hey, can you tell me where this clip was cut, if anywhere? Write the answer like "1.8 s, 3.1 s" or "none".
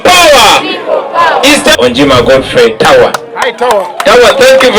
1.8 s